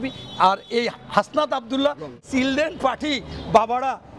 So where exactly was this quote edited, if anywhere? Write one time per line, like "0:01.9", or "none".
0:02.2